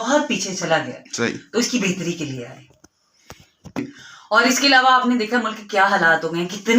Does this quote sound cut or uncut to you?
uncut